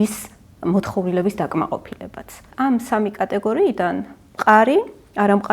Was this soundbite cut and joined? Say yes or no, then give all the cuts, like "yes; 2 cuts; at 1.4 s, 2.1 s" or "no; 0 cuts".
yes; 1 cut; at 2.4 s